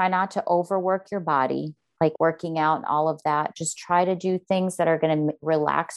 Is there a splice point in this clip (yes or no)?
yes